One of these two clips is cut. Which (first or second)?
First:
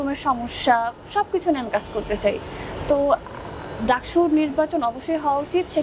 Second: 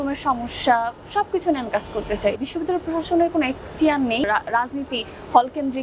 second